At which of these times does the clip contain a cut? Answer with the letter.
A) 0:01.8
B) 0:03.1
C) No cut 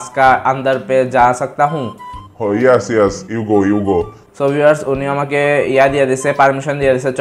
C